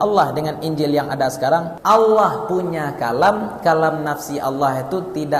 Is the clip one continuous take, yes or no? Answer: no